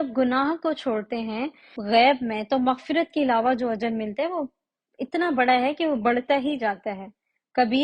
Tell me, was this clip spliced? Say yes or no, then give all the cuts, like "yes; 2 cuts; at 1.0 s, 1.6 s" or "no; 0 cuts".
yes; 1 cut; at 1.7 s